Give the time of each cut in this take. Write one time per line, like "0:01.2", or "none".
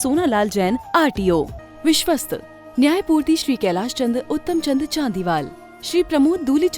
0:01.6